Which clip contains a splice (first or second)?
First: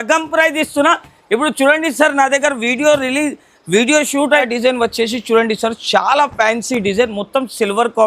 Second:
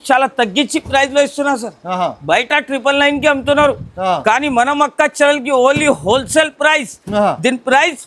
first